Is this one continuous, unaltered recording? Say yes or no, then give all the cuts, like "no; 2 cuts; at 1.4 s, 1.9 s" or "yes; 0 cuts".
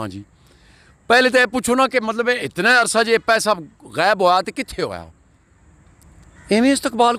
yes; 0 cuts